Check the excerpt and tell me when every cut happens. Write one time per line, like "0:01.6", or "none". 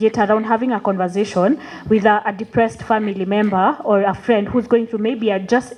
none